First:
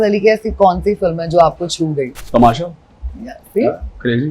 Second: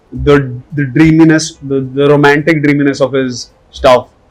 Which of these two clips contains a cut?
first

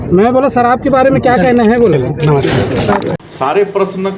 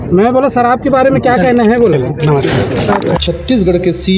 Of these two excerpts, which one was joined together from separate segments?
first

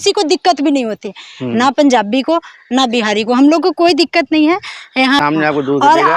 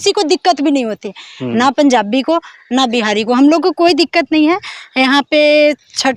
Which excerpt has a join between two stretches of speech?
first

